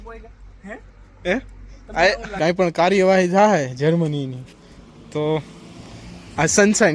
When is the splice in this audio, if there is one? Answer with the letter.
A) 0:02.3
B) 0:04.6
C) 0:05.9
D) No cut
A